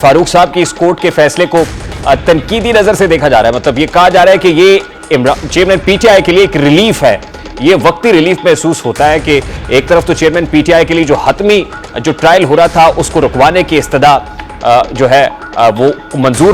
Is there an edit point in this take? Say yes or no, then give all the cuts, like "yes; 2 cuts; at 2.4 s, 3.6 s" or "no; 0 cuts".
no; 0 cuts